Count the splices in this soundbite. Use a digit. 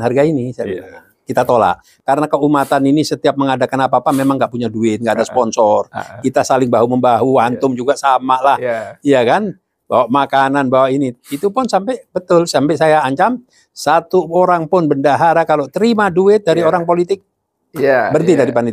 1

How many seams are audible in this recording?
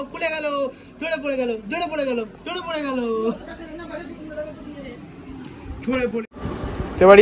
0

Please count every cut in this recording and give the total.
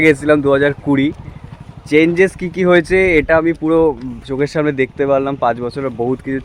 0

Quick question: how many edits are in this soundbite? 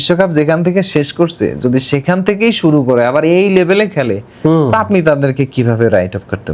0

